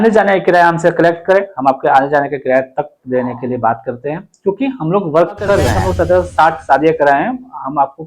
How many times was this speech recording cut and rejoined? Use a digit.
1